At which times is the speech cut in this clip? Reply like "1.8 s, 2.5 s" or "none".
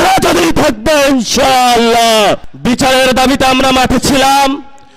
2.5 s